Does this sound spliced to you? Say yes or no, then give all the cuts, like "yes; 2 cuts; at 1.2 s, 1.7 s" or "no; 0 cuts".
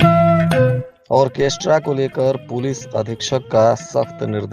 yes; 1 cut; at 0.9 s